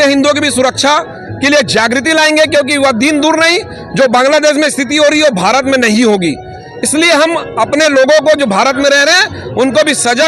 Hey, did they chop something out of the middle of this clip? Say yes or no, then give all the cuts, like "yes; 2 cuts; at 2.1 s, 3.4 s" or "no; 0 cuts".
no; 0 cuts